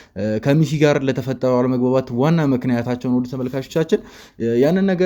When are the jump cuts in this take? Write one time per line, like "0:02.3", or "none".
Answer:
none